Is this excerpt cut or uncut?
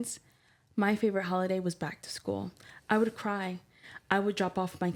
uncut